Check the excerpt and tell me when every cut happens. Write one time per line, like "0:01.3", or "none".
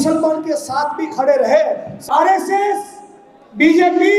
0:02.0

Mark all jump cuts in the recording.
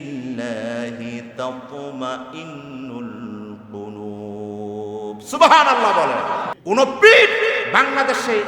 0:06.5

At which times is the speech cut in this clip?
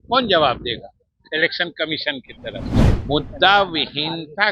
0:02.8

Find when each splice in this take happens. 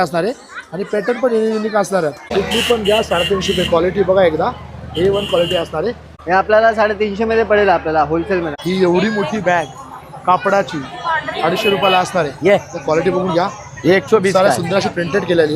0:02.3
0:06.1
0:08.5

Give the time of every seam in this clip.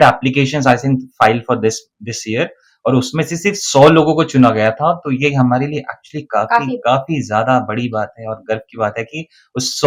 none

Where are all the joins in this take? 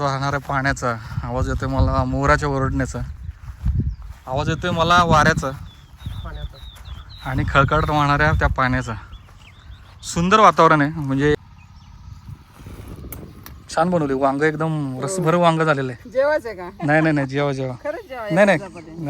0:11.4

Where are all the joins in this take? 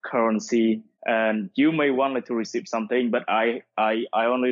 0:00.9

